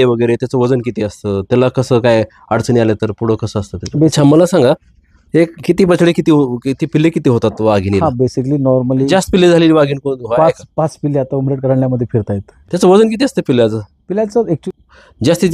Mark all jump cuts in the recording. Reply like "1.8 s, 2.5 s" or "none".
4.1 s, 9.1 s, 12.6 s, 14.6 s